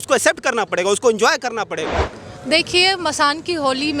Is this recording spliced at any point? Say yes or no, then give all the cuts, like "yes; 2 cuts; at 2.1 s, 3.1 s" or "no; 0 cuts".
yes; 1 cut; at 2.0 s